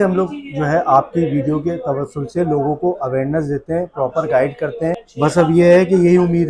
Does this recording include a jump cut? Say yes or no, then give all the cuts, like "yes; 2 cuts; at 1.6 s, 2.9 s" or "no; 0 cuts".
yes; 1 cut; at 5.1 s